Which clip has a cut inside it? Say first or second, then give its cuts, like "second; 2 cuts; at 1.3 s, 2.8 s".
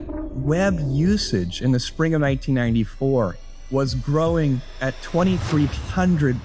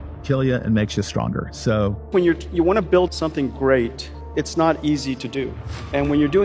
second; 2 cuts; at 2.1 s, 4.2 s